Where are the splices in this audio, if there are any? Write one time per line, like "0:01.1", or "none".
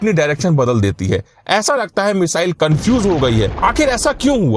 0:03.5